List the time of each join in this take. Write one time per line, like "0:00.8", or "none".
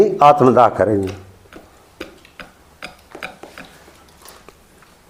none